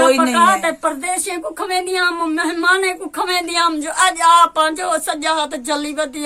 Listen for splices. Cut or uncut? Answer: uncut